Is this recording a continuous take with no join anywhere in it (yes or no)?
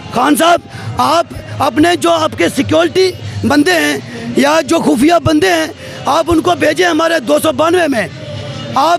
yes